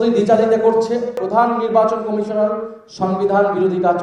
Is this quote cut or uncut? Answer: cut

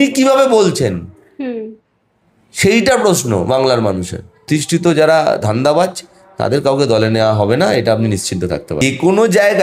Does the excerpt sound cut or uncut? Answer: cut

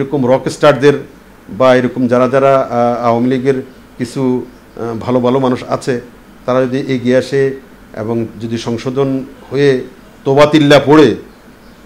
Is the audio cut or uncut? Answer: uncut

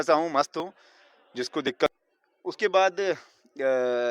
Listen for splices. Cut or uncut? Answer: cut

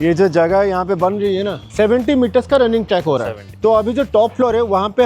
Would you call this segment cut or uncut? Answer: cut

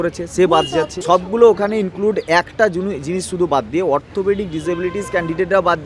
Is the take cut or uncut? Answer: cut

